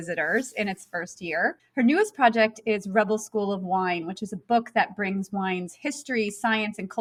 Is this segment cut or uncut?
uncut